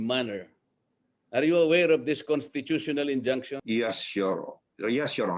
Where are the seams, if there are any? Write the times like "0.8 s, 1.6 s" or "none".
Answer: 3.6 s